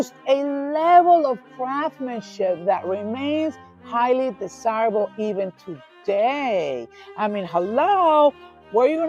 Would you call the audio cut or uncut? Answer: uncut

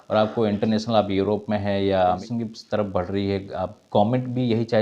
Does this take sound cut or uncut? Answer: cut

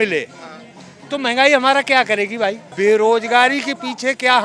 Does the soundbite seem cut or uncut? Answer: cut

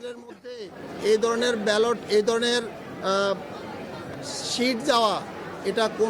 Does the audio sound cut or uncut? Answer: uncut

